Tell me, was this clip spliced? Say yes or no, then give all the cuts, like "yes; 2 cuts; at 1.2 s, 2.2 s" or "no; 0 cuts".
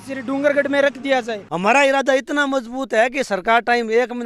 yes; 1 cut; at 1.4 s